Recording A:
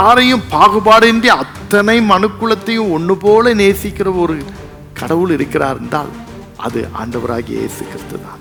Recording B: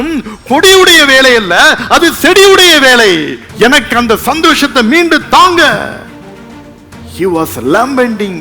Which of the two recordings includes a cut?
B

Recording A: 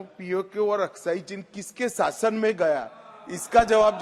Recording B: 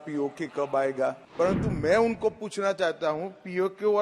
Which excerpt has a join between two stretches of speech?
B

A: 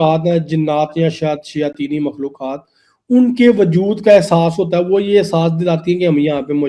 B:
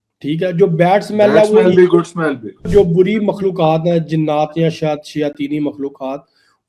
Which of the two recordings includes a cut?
B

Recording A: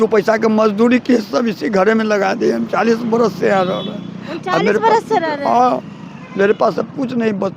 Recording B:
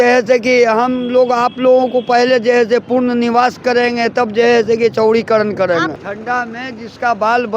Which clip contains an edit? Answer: B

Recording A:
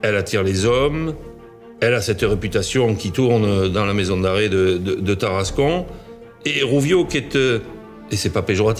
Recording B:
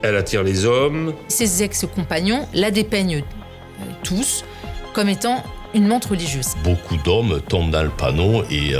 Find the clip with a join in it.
B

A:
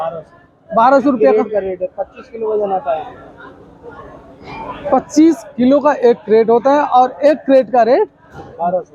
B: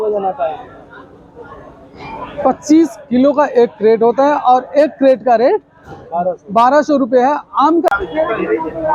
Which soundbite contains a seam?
B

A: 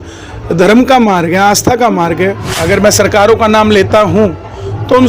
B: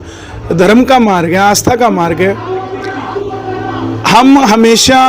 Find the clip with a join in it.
A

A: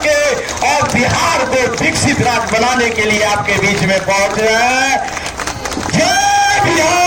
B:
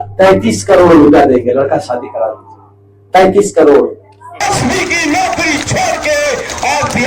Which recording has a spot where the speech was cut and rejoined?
B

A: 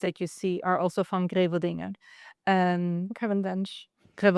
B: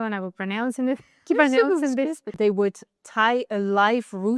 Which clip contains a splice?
B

